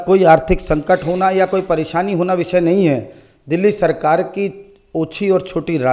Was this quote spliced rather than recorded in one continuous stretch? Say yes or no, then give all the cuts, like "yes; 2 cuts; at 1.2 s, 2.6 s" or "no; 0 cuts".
no; 0 cuts